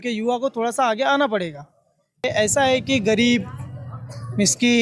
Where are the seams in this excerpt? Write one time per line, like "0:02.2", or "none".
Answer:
0:02.2

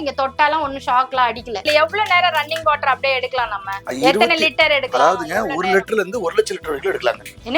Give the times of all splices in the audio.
0:01.6

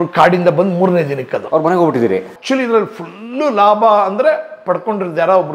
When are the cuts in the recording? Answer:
0:01.4
0:02.3

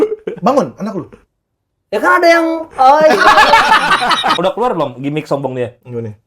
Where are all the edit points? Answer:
0:04.4

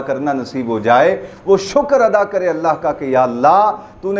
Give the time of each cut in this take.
none

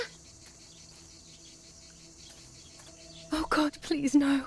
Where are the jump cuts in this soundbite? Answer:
0:02.9

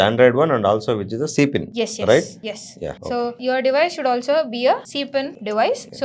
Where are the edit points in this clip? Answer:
none

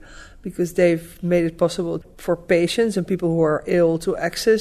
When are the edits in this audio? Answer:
0:02.1

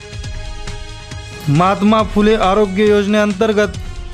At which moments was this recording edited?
0:01.1

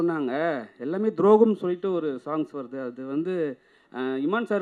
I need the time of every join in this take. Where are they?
none

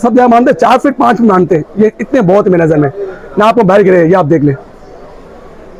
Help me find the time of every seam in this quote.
none

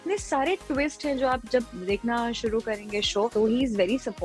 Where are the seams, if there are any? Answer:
0:03.3

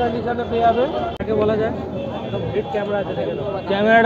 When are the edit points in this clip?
0:01.2

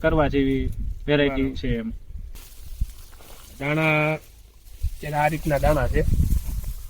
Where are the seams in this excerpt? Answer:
0:02.4

